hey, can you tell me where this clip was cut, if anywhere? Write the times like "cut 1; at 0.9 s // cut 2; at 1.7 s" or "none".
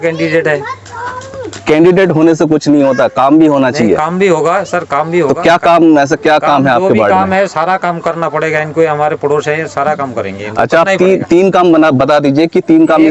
none